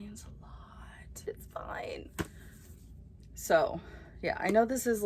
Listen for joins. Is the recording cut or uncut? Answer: uncut